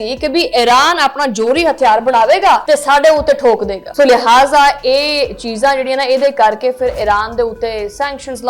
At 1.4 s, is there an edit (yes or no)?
no